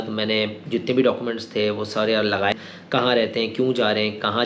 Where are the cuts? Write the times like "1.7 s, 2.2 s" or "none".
2.5 s